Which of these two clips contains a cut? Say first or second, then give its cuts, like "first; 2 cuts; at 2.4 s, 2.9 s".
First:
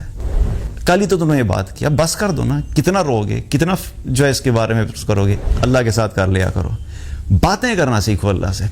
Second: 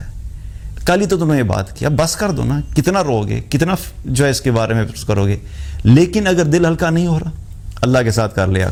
first; 1 cut; at 5.5 s